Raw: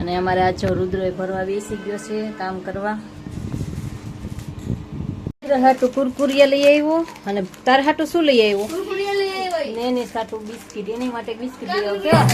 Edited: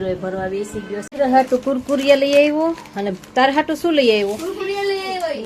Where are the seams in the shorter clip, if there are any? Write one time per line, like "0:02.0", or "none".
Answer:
0:01.1